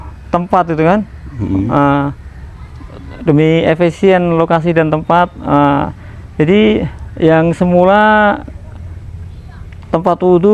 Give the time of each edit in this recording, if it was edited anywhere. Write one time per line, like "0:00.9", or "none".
none